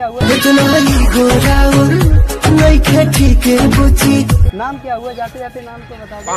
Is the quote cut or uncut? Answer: uncut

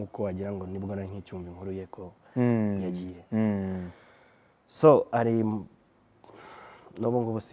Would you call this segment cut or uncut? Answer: uncut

